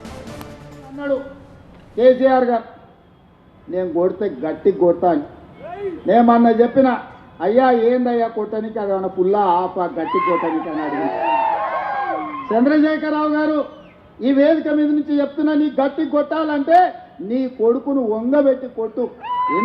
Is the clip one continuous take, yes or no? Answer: no